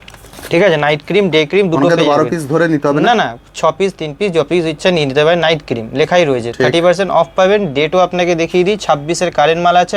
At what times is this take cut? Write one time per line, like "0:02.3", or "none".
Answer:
none